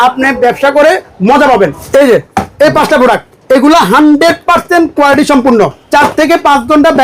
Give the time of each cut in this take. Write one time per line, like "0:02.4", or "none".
0:01.8
0:03.3
0:05.8